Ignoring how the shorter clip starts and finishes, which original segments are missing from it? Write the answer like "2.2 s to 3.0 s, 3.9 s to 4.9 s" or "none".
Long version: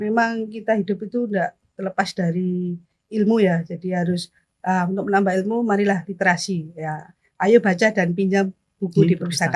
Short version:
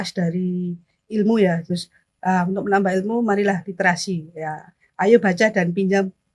3.7 s to 4.1 s